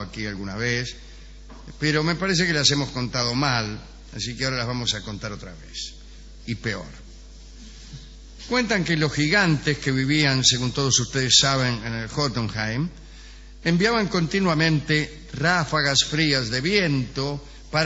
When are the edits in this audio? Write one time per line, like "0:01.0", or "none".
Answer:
0:16.8